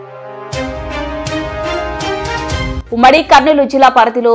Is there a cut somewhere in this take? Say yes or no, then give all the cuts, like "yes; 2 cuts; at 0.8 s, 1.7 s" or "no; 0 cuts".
yes; 1 cut; at 2.7 s